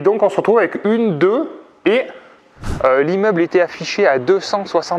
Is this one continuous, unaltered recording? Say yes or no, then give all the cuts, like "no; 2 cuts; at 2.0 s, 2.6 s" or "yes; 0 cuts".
no; 1 cut; at 2.6 s